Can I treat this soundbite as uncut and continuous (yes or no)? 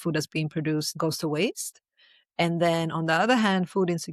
no